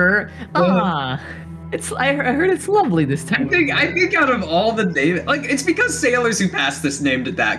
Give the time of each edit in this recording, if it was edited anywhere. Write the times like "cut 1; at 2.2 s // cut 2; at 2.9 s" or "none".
none